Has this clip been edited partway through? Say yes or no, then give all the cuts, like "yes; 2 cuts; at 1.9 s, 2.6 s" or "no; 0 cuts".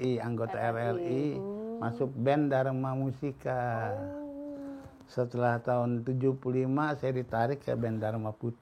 no; 0 cuts